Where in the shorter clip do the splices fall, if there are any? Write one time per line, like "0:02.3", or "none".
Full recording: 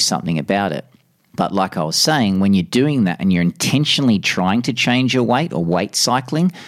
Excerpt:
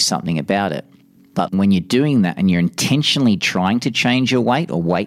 0:01.5